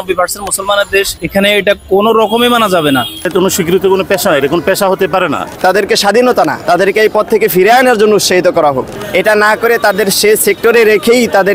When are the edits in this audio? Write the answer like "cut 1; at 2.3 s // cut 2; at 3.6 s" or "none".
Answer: cut 1; at 1.2 s // cut 2; at 3.3 s // cut 3; at 5.5 s // cut 4; at 6.6 s // cut 5; at 8.9 s